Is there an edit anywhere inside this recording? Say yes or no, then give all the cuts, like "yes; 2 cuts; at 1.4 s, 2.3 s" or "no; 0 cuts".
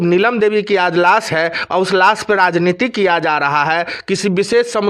no; 0 cuts